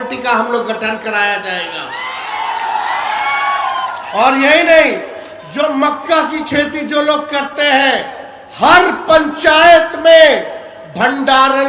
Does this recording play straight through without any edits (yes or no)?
yes